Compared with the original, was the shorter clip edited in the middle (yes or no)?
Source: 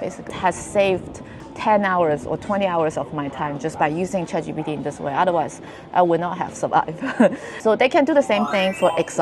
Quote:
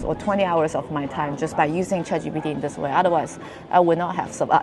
no